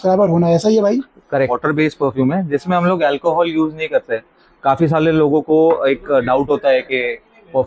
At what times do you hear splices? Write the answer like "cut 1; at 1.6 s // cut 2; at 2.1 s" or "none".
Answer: cut 1; at 1.5 s